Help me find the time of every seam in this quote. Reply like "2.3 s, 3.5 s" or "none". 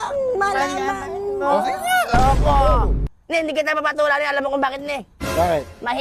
3.1 s